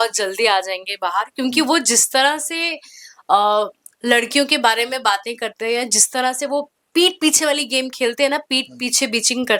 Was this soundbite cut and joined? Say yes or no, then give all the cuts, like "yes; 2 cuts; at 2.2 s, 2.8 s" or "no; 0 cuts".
no; 0 cuts